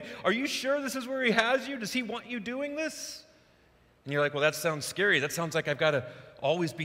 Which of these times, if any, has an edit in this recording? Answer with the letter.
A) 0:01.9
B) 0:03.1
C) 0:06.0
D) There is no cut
D